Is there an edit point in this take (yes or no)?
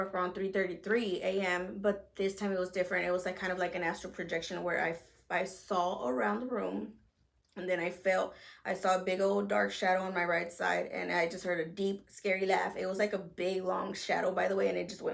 no